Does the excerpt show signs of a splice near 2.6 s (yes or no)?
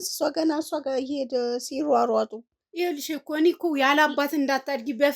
yes